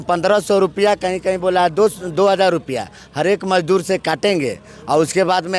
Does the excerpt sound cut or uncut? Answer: uncut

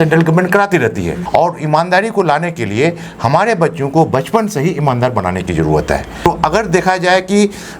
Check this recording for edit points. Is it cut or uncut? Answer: cut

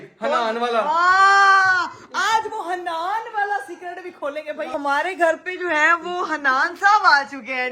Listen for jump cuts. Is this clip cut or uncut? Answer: cut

